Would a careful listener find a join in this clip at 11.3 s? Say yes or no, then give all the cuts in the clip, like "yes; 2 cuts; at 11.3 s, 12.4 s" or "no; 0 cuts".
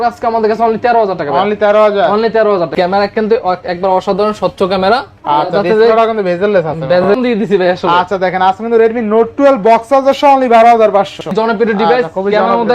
yes; 3 cuts; at 2.7 s, 7.1 s, 11.3 s